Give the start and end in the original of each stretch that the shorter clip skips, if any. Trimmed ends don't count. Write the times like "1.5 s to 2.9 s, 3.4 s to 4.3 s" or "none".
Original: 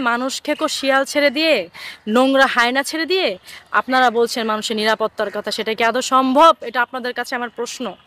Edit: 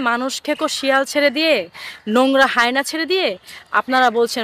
none